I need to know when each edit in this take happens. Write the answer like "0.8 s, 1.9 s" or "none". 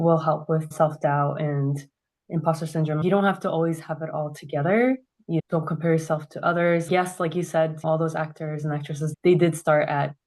5.4 s, 9.1 s